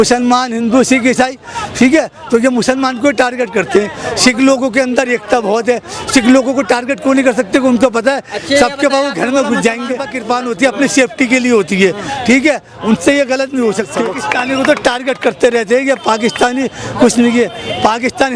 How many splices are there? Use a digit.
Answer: 2